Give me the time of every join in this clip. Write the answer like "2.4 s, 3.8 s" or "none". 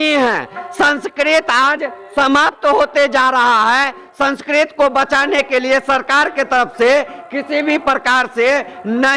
none